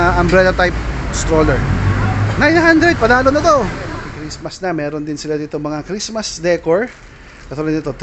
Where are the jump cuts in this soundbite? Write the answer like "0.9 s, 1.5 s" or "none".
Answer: none